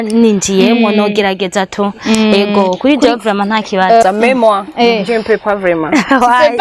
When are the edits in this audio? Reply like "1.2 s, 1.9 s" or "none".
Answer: 4.0 s

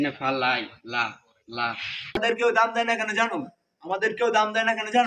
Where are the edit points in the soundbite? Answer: 2.2 s

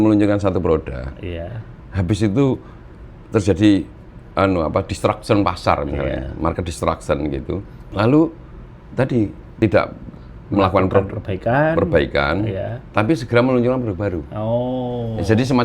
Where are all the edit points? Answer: 7.8 s, 9.4 s

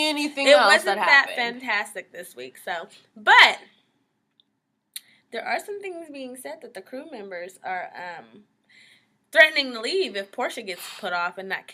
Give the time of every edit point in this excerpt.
1.5 s

